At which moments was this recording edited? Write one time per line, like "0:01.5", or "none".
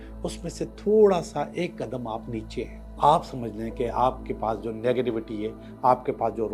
0:02.9

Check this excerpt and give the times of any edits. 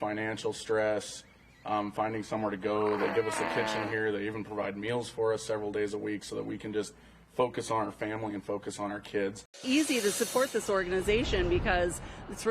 0:09.6

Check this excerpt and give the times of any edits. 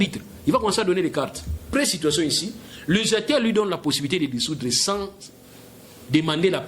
0:01.5

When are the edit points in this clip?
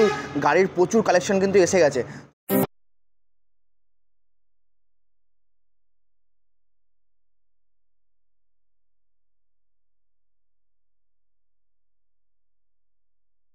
none

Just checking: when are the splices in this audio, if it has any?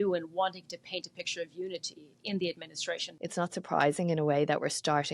0:03.0

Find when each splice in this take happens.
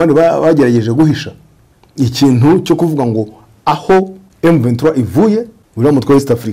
0:04.2
0:05.6

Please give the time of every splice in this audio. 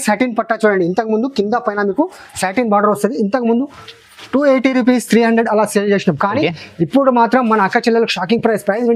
none

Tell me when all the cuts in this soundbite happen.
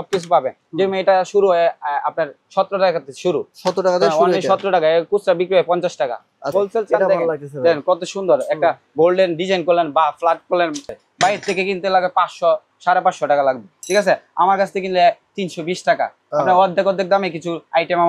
0:06.5
0:11.0

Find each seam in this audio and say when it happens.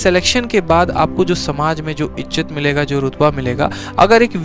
none

